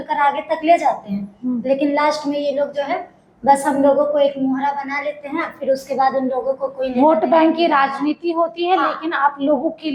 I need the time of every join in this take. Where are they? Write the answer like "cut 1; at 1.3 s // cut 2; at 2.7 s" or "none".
none

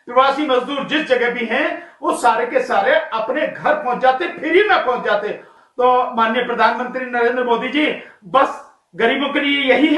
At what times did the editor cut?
cut 1; at 5.5 s

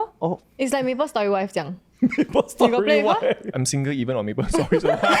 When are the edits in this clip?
cut 1; at 3.5 s

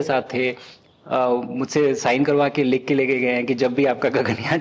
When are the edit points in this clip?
none

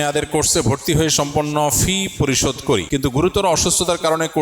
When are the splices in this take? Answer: cut 1; at 2.8 s

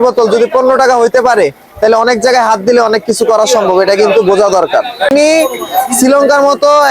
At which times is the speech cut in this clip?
cut 1; at 5.1 s

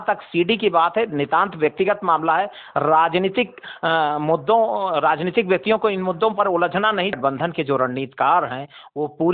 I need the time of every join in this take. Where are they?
cut 1; at 7.2 s

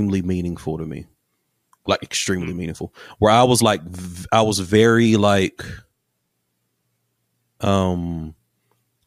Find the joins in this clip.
none

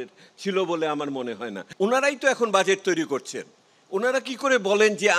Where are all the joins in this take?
cut 1; at 1.6 s

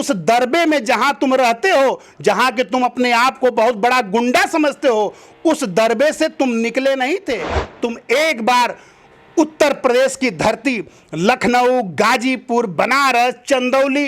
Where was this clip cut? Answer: cut 1; at 7.6 s

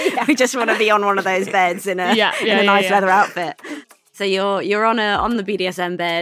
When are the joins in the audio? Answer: cut 1; at 4.1 s // cut 2; at 5.4 s

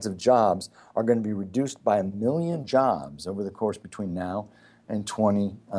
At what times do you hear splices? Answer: none

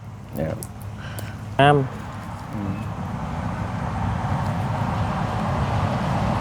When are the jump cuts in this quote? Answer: cut 1; at 1.6 s

